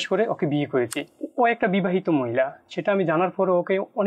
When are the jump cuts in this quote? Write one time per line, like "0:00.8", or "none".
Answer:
0:01.0